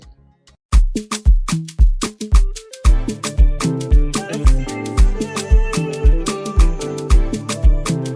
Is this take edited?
no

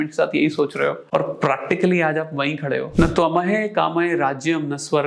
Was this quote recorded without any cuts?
no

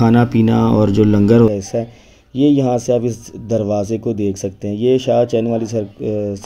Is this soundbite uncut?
no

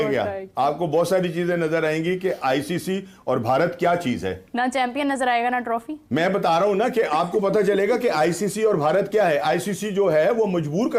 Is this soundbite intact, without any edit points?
yes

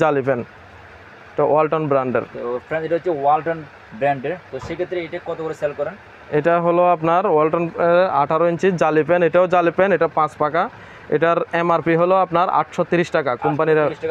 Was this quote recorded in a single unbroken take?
yes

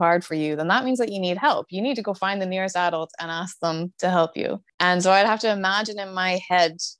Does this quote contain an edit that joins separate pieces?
yes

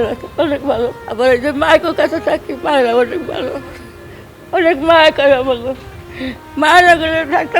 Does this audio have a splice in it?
yes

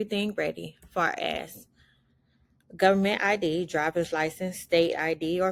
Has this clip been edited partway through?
no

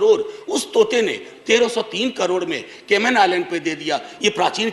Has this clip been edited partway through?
no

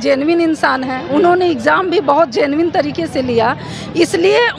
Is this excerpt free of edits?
yes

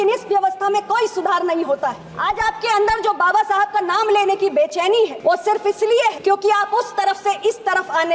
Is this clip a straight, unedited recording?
no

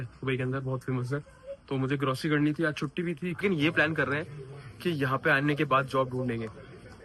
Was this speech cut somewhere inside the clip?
yes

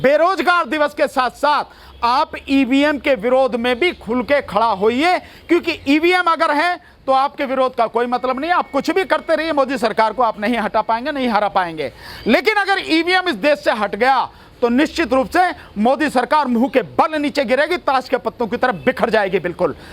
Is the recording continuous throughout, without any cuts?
yes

